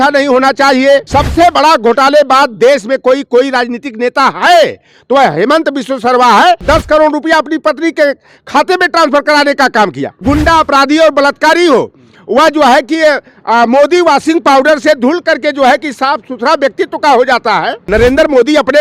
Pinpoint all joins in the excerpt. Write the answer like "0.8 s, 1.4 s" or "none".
1.1 s, 6.6 s, 10.1 s, 17.8 s

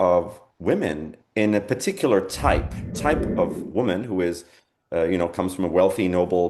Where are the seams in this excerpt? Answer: 2.8 s

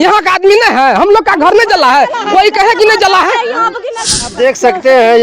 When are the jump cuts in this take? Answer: 4.3 s

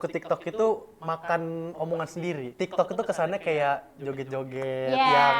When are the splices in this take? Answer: 2.5 s

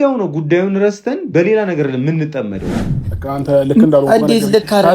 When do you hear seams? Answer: 2.8 s

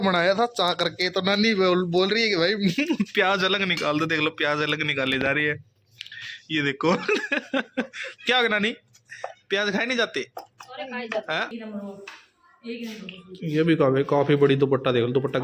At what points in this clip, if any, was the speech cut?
11.5 s

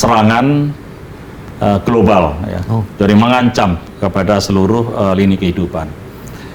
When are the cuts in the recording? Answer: none

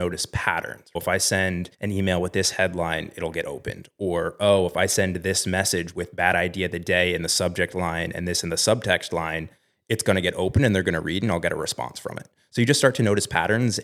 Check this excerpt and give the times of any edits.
1.0 s, 1.7 s

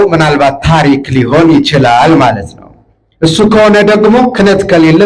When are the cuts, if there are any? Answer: none

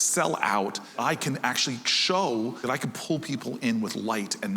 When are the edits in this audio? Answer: 0.9 s, 2.6 s

